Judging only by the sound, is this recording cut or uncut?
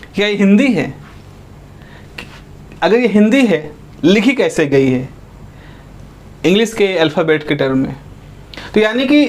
uncut